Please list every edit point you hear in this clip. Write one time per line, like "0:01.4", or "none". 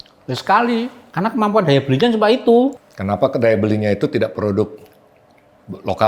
0:01.0
0:02.8